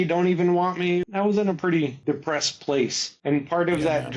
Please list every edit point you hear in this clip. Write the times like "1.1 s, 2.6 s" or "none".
1.0 s, 2.0 s, 3.1 s